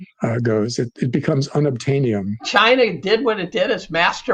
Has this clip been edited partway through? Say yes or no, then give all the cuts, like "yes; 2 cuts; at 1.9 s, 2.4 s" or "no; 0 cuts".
yes; 1 cut; at 2.4 s